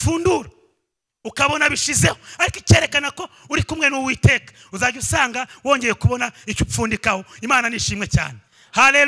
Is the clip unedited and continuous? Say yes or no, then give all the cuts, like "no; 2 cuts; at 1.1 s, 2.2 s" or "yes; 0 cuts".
yes; 0 cuts